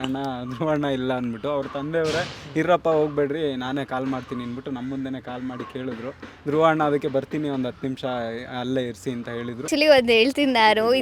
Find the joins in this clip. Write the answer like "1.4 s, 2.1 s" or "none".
9.6 s